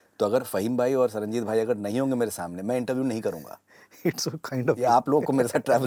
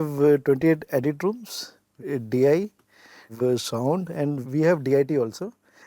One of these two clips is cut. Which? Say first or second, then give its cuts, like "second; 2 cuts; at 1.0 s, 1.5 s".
second; 3 cuts; at 1.9 s, 3.3 s, 4.4 s